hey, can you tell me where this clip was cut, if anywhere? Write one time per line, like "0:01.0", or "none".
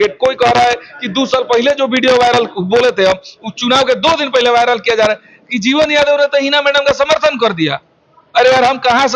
none